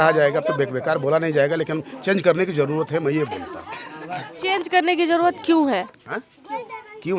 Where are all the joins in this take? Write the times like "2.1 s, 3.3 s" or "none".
none